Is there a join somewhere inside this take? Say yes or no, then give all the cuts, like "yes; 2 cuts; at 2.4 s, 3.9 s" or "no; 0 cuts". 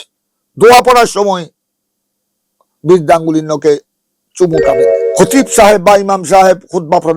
yes; 1 cut; at 5.0 s